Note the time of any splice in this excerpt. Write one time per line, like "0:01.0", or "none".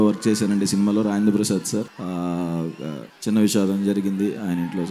0:01.9
0:03.1